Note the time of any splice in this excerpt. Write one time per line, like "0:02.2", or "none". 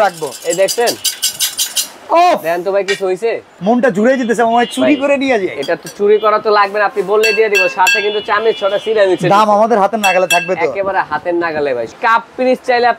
0:03.5
0:11.9